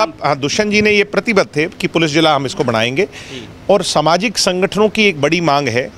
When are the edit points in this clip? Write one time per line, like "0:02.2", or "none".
none